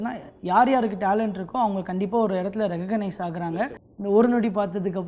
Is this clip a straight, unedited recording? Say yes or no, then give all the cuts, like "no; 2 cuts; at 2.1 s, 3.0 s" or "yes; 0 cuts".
no; 1 cut; at 3.8 s